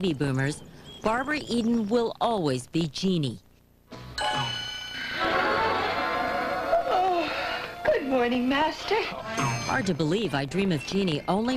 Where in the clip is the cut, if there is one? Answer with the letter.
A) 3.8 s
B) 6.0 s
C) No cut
B